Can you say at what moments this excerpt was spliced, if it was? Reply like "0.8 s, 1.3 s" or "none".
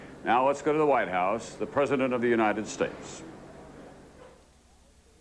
3.3 s